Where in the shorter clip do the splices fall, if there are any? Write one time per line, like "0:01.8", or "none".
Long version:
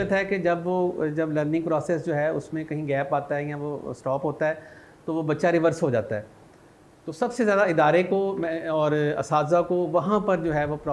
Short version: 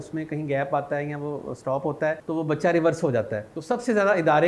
0:02.2
0:03.5